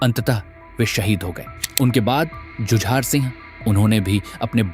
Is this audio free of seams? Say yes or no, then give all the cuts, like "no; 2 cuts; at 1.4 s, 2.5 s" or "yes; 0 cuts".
no; 1 cut; at 3.4 s